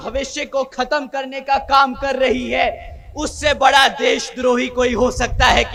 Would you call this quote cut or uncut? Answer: uncut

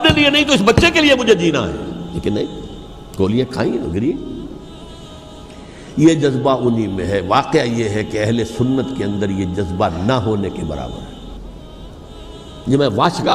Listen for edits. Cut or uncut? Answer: uncut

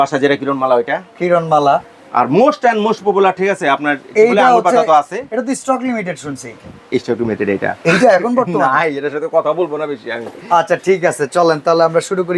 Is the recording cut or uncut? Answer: uncut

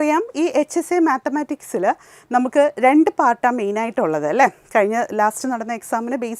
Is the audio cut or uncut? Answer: uncut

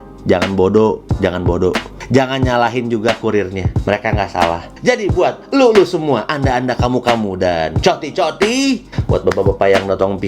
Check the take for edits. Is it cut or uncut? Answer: cut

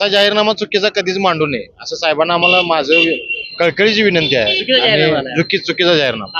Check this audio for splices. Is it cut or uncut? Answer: uncut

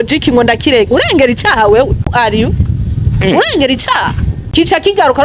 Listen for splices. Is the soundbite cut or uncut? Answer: cut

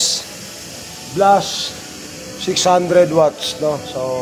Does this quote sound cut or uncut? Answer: uncut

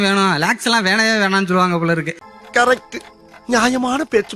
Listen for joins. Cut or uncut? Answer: uncut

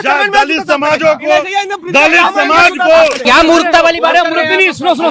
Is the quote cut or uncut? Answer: cut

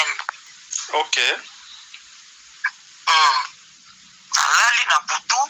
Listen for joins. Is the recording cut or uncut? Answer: uncut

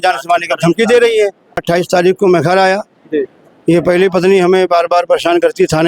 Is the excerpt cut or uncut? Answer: cut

